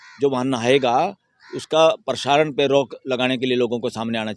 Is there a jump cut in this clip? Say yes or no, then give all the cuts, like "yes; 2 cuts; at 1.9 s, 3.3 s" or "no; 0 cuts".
no; 0 cuts